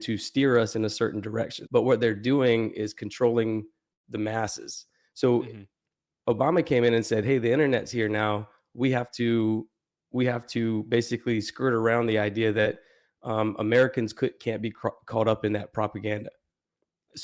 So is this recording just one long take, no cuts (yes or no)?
no